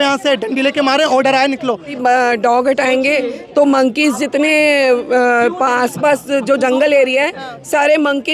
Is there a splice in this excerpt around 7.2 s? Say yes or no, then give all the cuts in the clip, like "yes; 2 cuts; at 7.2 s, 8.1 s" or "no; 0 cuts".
no; 1 cut; at 1.9 s